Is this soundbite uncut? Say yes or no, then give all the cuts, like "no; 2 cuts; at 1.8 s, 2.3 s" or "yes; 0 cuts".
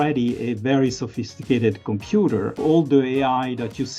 no; 1 cut; at 2.6 s